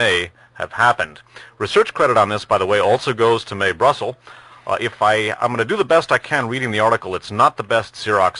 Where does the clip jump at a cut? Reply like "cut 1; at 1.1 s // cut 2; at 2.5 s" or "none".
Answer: cut 1; at 5.3 s